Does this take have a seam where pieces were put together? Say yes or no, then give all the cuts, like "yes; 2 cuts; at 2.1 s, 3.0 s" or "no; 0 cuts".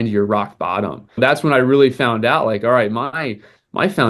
yes; 1 cut; at 1.2 s